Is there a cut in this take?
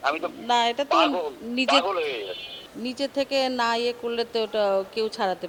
no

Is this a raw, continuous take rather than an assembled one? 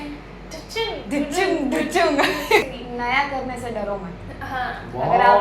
no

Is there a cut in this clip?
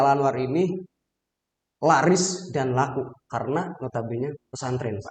no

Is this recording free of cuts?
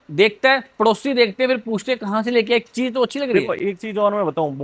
yes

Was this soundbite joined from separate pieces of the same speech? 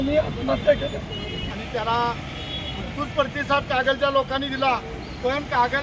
yes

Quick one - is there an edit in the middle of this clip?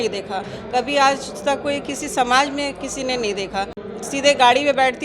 yes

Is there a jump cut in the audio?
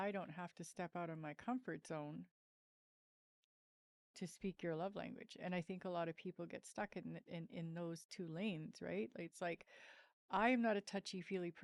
no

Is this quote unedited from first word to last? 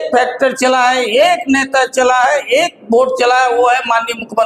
yes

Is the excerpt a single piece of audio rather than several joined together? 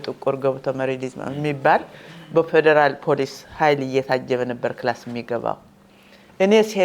yes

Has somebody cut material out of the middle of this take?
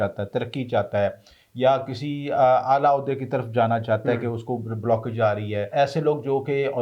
yes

